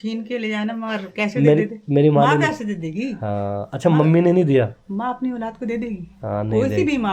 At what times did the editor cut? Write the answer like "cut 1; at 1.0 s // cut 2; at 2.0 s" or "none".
none